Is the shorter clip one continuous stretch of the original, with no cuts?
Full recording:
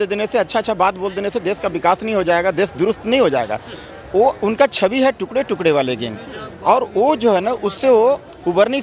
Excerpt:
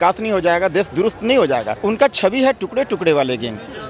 no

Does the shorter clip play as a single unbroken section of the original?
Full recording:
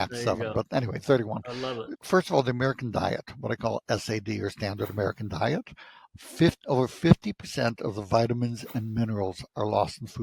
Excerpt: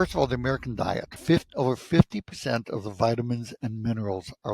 no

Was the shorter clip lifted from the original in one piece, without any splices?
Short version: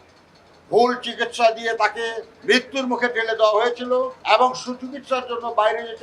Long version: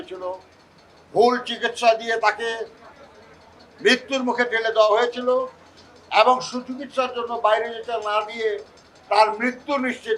no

